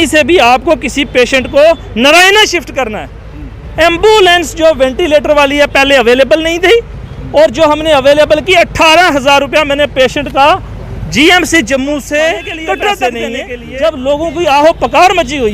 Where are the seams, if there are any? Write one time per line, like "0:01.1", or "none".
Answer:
0:13.2

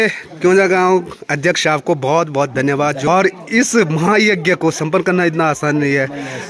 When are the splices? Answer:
0:03.0

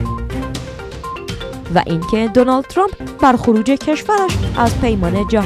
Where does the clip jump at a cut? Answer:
0:01.2

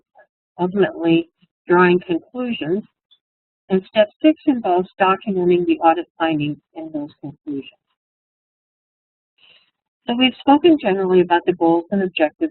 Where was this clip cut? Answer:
0:05.1

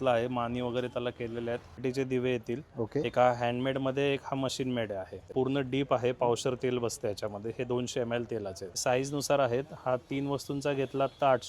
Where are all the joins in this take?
0:01.8
0:05.3
0:08.7

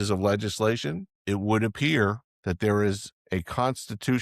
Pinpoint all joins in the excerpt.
0:01.1
0:02.3
0:03.1

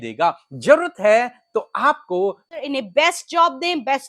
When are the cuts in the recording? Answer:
0:02.6

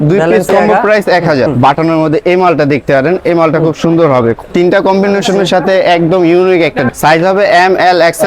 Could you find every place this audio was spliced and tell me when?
0:01.5
0:04.4
0:06.9

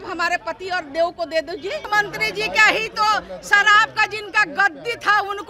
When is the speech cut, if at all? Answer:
0:01.8

